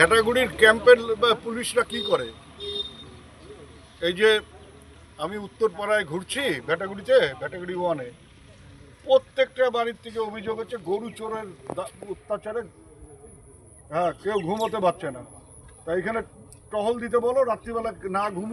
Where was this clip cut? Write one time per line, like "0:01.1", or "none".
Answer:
none